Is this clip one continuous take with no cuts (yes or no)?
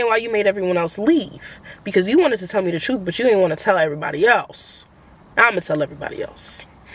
yes